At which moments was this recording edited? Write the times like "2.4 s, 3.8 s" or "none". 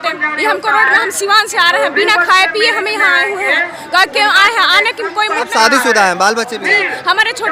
none